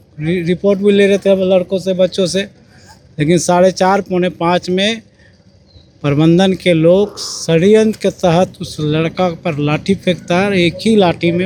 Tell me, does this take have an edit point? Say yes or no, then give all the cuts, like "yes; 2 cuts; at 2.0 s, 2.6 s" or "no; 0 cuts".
no; 0 cuts